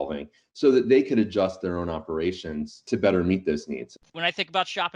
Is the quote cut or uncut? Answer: cut